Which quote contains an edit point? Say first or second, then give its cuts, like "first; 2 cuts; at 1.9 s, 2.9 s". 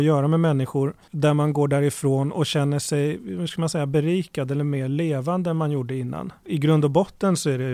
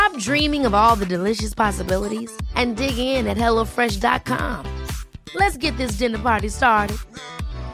first; 2 cuts; at 1.0 s, 6.4 s